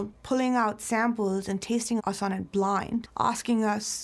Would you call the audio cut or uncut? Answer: cut